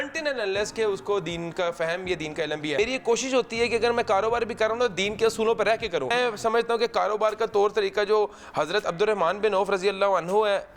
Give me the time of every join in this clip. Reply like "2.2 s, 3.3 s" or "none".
2.8 s, 6.1 s